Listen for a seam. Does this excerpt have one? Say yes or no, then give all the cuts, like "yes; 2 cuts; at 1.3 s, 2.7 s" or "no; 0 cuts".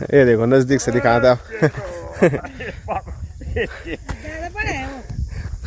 no; 0 cuts